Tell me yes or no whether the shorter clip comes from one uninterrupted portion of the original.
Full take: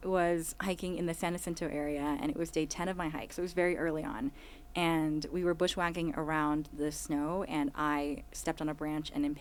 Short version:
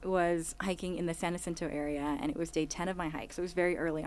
yes